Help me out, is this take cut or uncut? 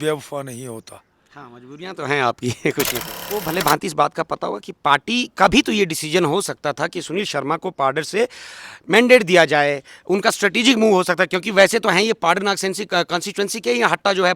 cut